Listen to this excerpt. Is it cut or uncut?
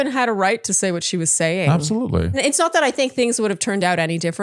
cut